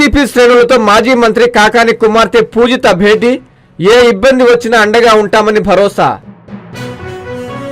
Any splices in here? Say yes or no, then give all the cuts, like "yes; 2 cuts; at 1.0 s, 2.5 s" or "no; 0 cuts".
yes; 1 cut; at 6.3 s